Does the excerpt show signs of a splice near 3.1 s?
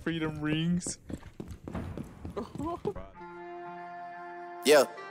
yes; 1 cut; at 3.1 s

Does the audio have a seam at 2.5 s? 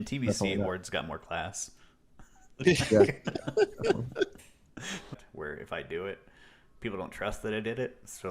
no; 1 cut; at 5.2 s

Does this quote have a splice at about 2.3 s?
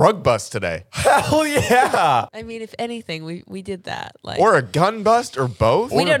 no; 0 cuts

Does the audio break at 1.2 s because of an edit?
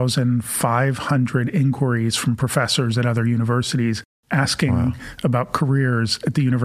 no; 1 cut; at 4.1 s

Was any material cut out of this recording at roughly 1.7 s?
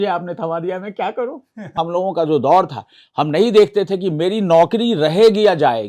yes; 1 cut; at 1.7 s

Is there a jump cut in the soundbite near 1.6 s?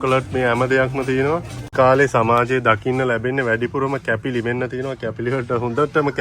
yes; 1 cut; at 1.6 s

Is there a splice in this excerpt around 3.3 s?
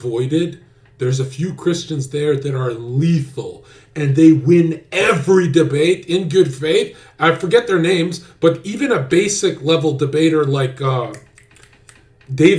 no; 0 cuts

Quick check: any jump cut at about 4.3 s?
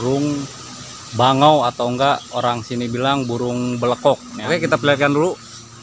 yes; 1 cut; at 4.3 s

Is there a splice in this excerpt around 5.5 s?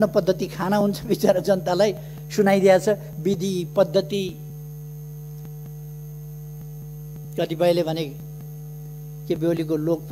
no; 1 cut; at 7.2 s

